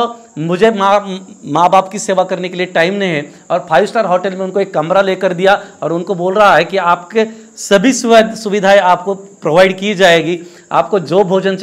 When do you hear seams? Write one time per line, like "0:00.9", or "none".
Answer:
none